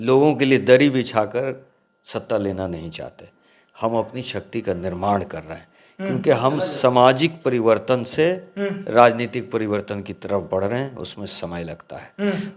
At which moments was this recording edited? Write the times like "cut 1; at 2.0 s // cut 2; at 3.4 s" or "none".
none